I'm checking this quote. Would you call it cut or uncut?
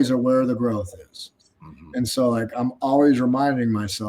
uncut